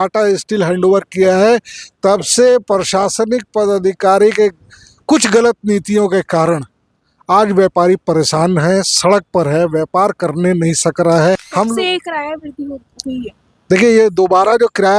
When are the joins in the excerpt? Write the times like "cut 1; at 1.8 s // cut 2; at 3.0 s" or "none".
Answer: cut 1; at 11.5 s